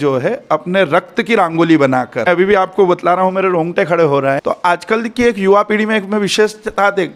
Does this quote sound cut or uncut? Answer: cut